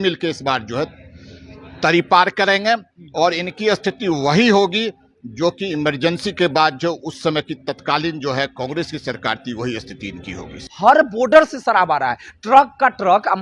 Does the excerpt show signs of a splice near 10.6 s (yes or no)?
yes